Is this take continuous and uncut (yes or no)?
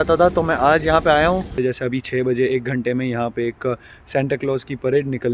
no